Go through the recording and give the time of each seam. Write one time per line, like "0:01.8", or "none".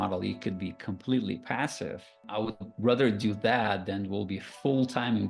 0:02.3